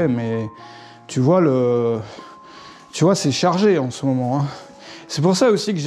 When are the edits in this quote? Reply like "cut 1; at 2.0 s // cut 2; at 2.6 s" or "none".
none